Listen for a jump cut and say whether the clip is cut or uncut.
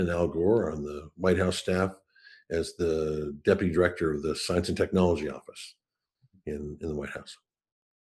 uncut